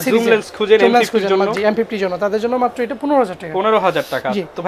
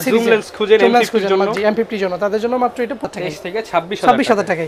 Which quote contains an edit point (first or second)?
second